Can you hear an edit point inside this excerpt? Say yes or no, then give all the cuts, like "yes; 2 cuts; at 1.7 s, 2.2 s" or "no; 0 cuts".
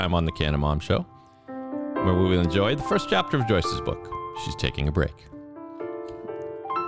no; 0 cuts